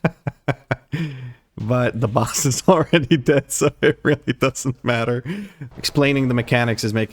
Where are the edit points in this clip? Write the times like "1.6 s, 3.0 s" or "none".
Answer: 5.7 s